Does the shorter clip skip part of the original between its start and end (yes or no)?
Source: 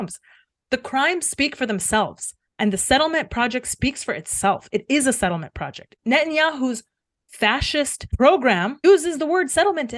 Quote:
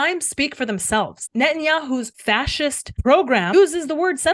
yes